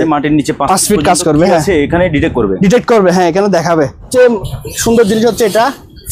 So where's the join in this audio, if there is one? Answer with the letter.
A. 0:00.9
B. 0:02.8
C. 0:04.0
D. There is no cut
C